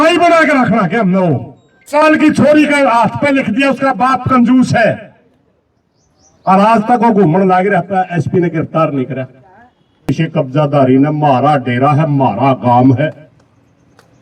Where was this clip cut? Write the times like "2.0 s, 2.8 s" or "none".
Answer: 1.9 s, 10.1 s